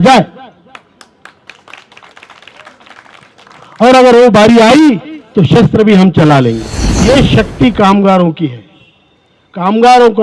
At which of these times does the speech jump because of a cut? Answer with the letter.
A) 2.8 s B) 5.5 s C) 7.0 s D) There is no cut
C